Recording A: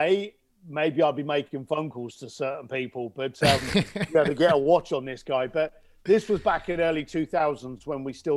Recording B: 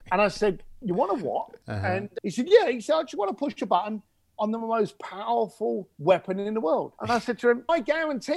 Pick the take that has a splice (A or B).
B